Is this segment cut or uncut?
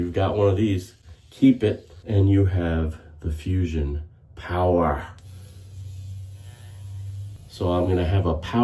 cut